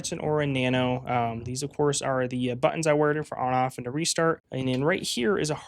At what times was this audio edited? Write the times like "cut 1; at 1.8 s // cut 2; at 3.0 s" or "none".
cut 1; at 4.5 s

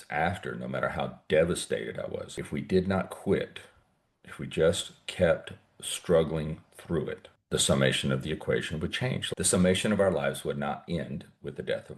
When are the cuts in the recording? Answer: cut 1; at 2.3 s // cut 2; at 7.3 s // cut 3; at 9.2 s

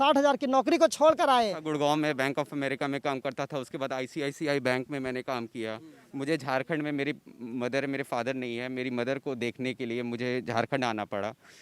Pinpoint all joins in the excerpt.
cut 1; at 1.6 s

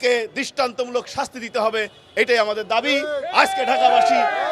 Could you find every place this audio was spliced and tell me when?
none

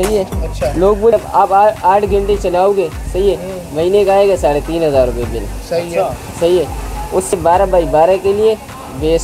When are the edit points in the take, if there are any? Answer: cut 1; at 1.1 s // cut 2; at 7.3 s

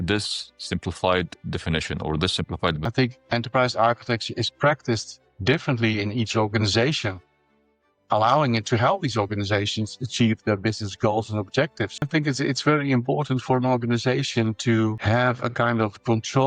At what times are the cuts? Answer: cut 1; at 2.9 s // cut 2; at 12.1 s

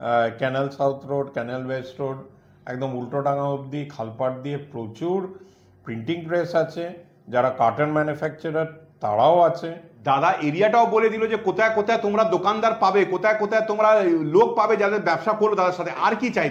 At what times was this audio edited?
none

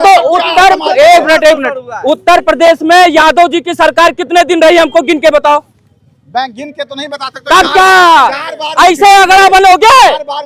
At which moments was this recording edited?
none

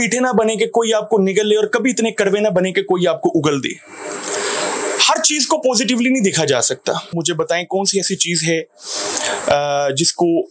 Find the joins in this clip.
cut 1; at 7.1 s

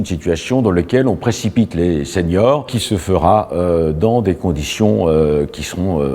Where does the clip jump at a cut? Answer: cut 1; at 2.8 s

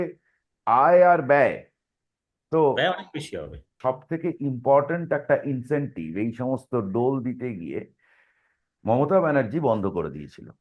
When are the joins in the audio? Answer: cut 1; at 3.7 s

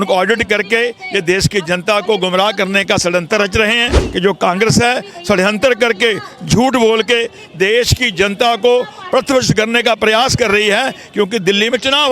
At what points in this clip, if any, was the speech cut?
cut 1; at 4.0 s

